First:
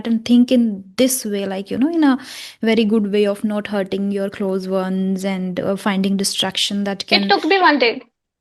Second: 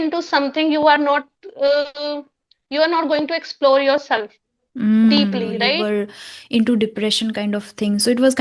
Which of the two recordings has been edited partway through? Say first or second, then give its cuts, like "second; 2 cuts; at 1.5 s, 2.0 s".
second; 1 cut; at 5.7 s